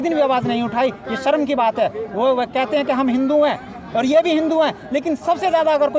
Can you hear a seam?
no; 0 cuts

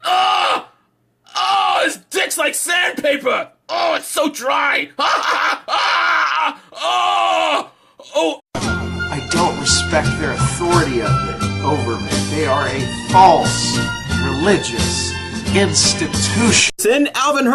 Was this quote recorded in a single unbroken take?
yes; 0 cuts

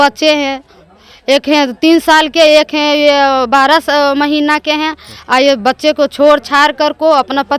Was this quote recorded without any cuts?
yes; 0 cuts

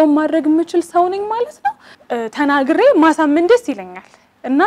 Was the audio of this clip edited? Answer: yes; 1 cut; at 1.9 s

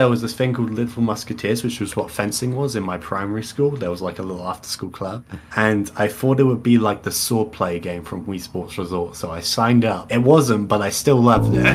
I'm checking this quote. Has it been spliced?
no; 0 cuts

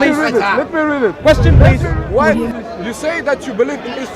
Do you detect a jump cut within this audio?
yes; 1 cut; at 1.9 s

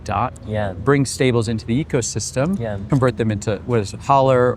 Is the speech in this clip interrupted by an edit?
yes; 1 cut; at 2.8 s

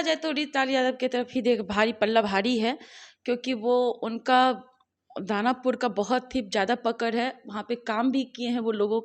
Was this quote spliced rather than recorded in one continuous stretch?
no; 0 cuts

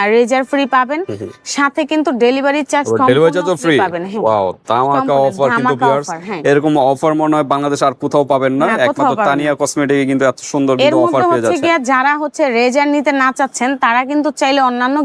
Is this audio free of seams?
yes; 0 cuts

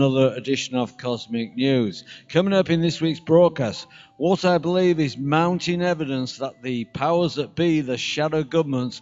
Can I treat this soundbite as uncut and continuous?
yes; 0 cuts

